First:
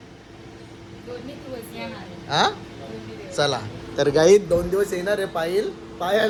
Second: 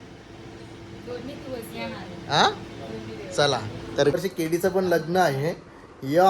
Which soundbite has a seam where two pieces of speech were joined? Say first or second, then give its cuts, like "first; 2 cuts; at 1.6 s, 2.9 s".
second; 1 cut; at 4.1 s